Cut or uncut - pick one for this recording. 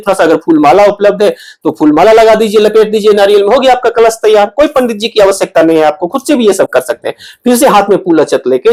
uncut